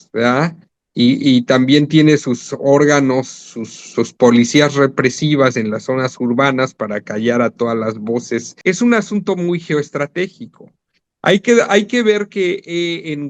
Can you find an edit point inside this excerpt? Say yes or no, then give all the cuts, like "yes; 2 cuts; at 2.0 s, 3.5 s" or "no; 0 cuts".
yes; 1 cut; at 8.5 s